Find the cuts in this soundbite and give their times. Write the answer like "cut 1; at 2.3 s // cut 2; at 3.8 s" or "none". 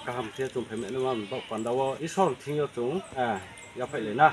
cut 1; at 2.0 s // cut 2; at 3.1 s